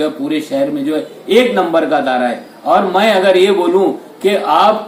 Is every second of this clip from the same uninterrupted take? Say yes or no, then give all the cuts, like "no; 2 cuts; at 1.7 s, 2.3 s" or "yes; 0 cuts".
yes; 0 cuts